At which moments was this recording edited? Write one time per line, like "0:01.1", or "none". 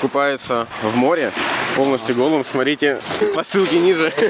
0:03.2